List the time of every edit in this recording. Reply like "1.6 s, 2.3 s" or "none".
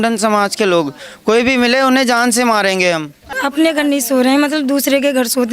3.4 s